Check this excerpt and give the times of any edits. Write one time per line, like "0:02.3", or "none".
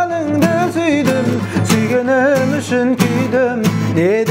none

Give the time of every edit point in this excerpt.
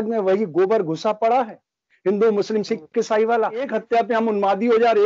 0:03.7

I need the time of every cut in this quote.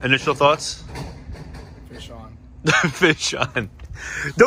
none

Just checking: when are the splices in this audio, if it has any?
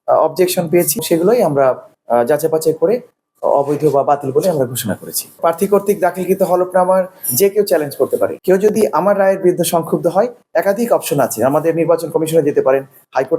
0:01.0
0:08.4

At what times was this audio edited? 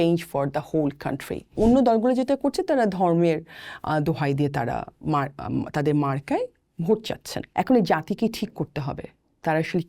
0:01.5
0:07.4

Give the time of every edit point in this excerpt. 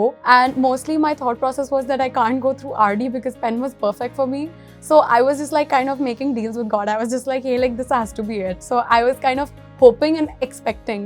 none

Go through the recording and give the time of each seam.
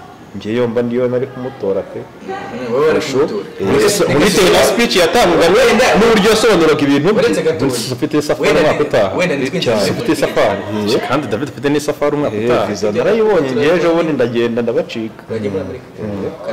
none

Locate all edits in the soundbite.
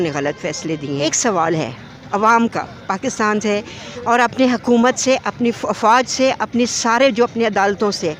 0:01.1

